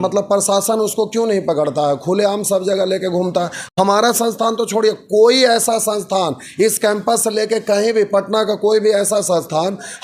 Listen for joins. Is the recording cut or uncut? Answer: uncut